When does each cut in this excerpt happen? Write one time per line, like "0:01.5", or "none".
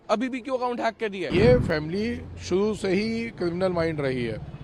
0:01.2